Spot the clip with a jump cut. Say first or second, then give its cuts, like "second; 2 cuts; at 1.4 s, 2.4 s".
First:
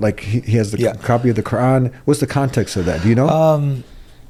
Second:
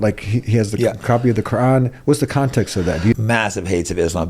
second; 1 cut; at 3.1 s